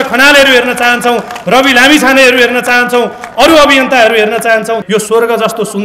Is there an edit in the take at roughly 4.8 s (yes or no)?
yes